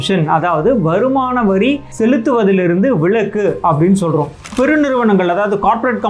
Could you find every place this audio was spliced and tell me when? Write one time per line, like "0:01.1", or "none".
0:01.9
0:04.5